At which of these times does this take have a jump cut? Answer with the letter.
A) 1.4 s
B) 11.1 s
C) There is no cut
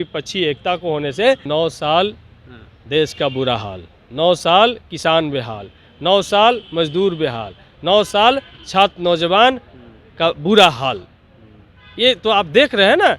A